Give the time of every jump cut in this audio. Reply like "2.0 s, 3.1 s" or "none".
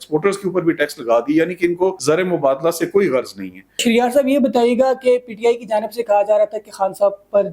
2.0 s, 3.8 s